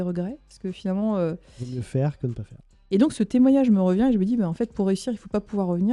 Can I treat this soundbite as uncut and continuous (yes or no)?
no